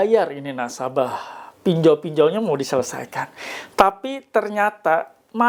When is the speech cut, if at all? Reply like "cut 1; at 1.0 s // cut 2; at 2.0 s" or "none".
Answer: none

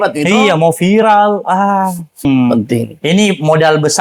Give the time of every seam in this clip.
cut 1; at 2.2 s

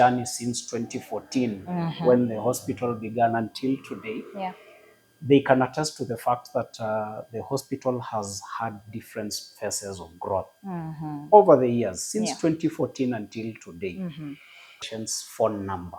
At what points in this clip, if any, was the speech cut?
cut 1; at 14.9 s

